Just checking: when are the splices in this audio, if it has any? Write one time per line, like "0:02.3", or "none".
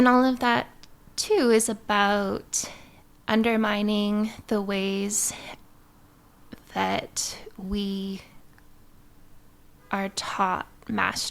none